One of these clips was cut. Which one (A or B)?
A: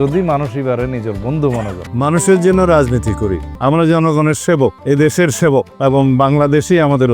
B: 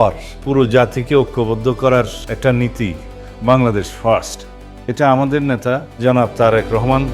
A